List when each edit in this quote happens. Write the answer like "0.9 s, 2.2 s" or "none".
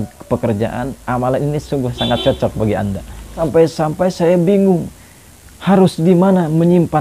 3.2 s